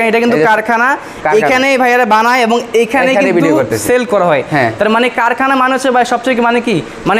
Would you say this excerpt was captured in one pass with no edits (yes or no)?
yes